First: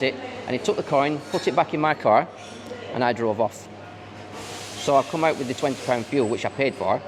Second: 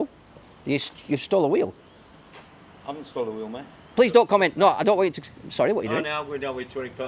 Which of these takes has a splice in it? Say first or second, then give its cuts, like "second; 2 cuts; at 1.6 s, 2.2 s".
second; 1 cut; at 3.8 s